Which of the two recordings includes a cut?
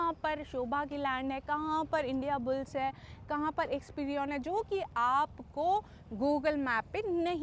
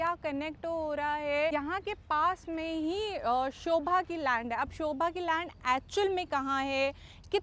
second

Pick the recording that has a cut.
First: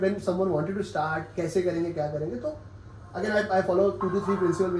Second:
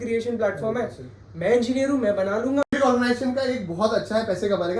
second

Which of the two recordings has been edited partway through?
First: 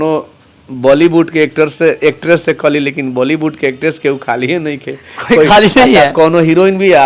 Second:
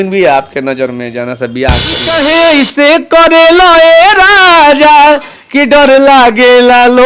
second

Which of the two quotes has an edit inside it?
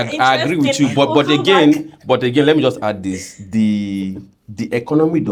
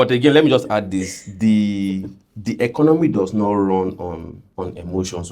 second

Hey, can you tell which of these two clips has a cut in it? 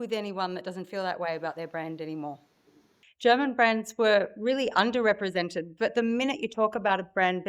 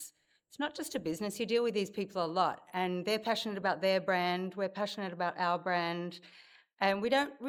first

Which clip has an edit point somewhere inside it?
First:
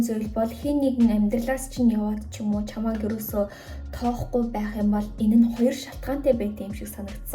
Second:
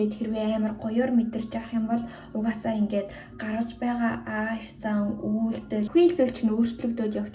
second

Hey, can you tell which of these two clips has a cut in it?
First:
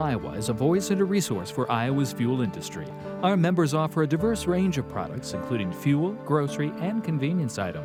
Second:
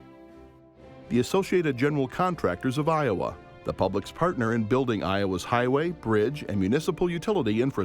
second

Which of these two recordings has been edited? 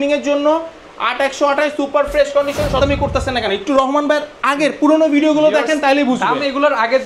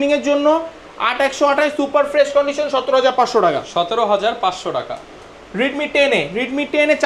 first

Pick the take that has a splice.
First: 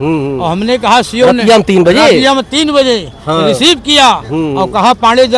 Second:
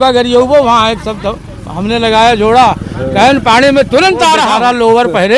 second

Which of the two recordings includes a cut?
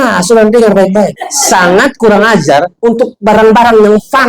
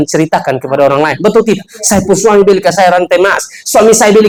first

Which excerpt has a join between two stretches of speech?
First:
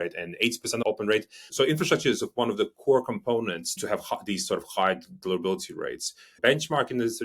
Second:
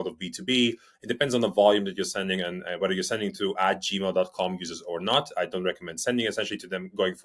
first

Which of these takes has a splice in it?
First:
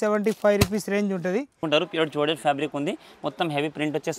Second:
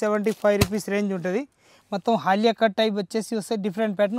first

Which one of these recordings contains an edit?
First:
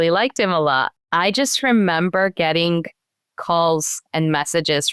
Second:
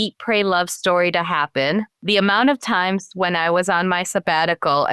first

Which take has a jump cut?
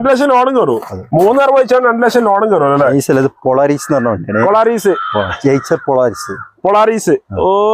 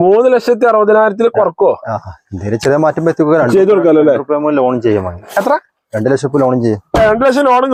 first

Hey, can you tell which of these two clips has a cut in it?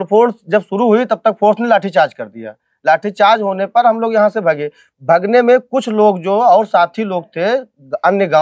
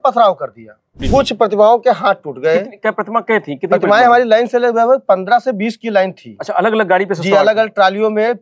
second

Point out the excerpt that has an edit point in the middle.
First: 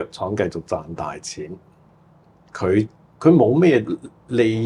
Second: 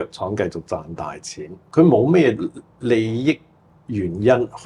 second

